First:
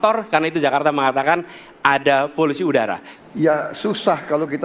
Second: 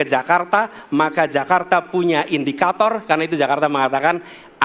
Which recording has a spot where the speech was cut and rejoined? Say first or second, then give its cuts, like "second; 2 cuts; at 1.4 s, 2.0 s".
first; 1 cut; at 3.1 s